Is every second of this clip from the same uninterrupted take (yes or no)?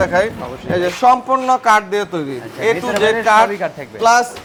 yes